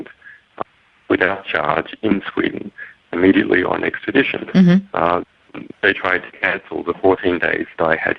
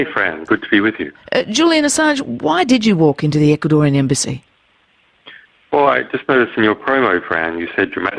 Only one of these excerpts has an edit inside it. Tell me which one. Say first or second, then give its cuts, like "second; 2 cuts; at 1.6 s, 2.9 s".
second; 1 cut; at 7.2 s